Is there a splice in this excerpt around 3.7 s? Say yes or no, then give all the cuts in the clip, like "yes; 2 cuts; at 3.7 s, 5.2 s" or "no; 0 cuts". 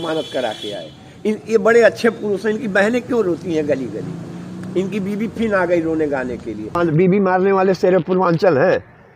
no; 1 cut; at 6.8 s